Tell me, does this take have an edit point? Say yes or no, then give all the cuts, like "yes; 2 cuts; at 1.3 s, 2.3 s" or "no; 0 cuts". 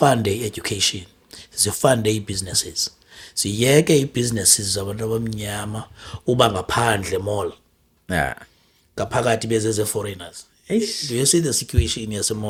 no; 0 cuts